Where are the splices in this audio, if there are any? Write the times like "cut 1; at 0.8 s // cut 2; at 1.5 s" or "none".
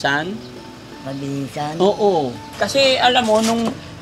cut 1; at 2.5 s